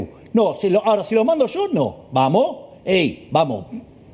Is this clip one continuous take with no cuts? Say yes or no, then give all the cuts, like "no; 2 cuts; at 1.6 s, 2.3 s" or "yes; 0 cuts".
yes; 0 cuts